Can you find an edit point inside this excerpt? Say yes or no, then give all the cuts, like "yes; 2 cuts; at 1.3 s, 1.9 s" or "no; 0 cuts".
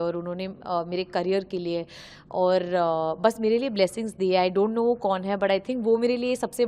no; 0 cuts